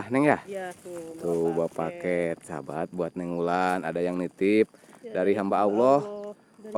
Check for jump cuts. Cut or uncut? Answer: uncut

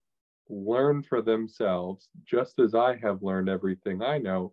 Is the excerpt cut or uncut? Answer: uncut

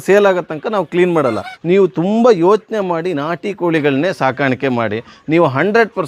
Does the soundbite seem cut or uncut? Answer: cut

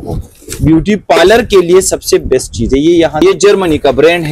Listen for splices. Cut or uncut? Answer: cut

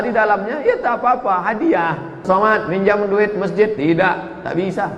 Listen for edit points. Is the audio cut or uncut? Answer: cut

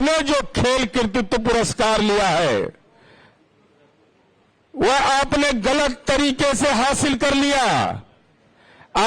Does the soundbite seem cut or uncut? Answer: uncut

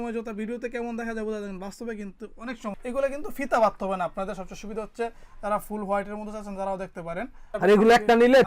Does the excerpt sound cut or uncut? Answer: cut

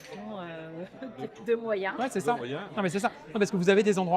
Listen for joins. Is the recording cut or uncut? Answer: cut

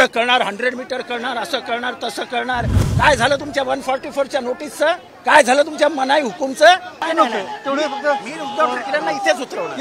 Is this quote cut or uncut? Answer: cut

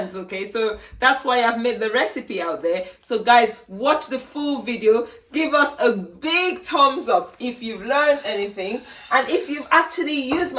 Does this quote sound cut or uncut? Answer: uncut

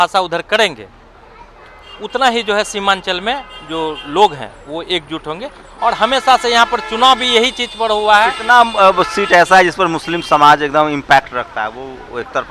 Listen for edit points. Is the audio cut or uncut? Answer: uncut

